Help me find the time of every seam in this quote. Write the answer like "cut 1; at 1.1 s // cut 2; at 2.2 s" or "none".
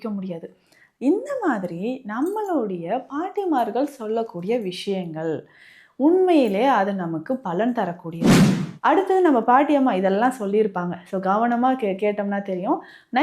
cut 1; at 8.2 s